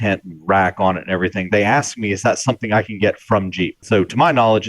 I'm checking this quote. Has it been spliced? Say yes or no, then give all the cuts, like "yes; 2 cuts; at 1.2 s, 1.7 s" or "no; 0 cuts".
yes; 1 cut; at 3.8 s